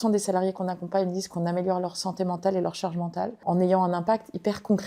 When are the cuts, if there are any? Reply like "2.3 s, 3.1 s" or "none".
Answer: 3.4 s